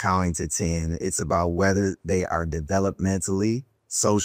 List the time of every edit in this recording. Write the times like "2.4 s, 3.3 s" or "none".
none